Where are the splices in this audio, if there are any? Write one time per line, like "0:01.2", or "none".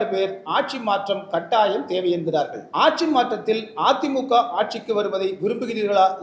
0:02.6